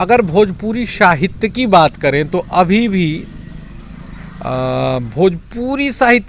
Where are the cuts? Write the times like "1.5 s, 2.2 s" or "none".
none